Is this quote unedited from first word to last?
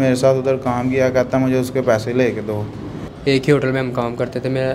no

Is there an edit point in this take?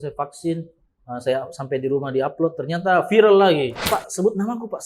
yes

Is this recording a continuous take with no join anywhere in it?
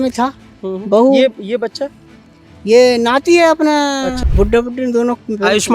no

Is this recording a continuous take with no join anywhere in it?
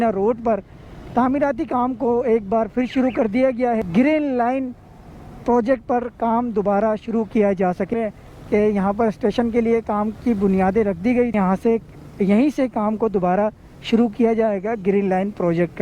no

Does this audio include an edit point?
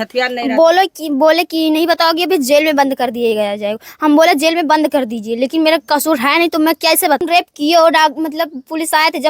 yes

